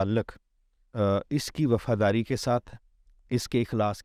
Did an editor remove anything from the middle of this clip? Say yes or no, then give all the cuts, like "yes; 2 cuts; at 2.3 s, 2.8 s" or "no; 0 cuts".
no; 0 cuts